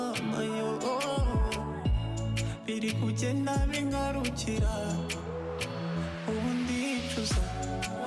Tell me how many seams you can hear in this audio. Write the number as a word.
zero